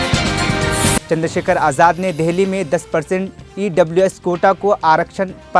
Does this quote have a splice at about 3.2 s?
no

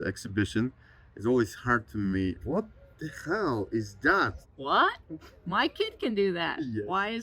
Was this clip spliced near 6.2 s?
no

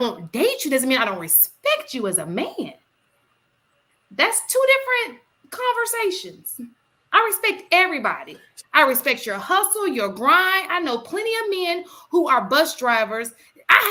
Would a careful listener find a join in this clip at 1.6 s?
no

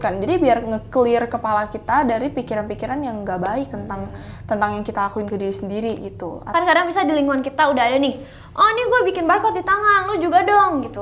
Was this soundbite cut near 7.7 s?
no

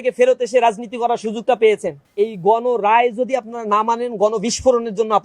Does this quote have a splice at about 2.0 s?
yes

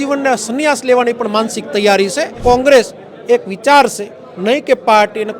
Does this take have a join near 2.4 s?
yes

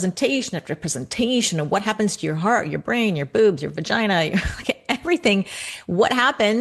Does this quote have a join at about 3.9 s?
no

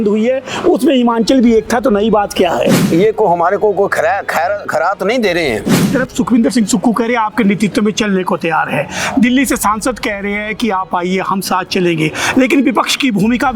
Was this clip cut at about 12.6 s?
no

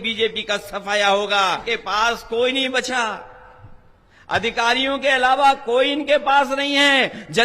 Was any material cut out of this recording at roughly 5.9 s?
no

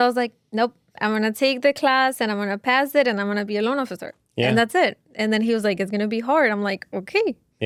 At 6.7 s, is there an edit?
no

